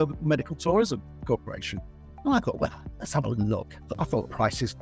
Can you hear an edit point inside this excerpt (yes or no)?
yes